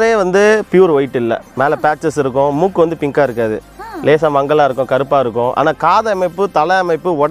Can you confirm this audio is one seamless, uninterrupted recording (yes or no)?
yes